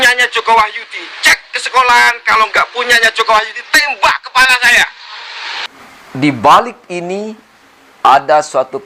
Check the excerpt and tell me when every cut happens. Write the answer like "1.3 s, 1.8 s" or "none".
5.6 s